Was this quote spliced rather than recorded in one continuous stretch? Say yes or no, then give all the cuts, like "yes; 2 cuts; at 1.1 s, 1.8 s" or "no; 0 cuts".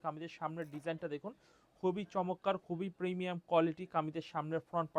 no; 0 cuts